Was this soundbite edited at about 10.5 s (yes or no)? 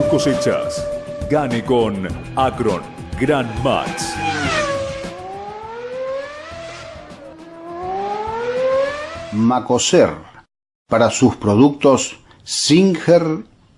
no